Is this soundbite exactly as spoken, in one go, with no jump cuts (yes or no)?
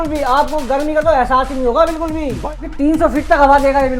no